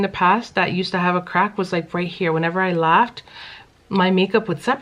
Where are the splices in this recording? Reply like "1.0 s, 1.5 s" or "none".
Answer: none